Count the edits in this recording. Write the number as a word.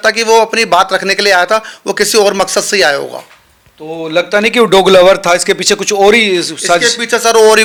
zero